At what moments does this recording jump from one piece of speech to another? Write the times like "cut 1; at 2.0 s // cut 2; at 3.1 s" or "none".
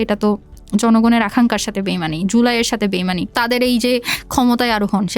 cut 1; at 3.3 s